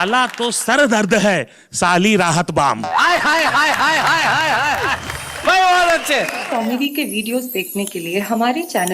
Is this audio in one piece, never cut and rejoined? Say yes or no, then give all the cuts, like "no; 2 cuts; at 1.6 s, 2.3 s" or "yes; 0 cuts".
no; 1 cut; at 6.4 s